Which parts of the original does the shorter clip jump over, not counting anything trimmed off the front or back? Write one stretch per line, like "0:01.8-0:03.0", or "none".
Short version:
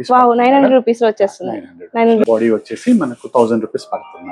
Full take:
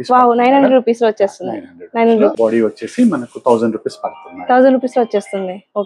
0:02.2-0:02.4